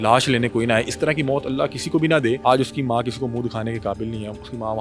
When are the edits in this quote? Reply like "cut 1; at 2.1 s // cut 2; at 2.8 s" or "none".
cut 1; at 2.4 s